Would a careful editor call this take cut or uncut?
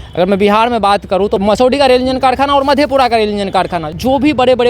cut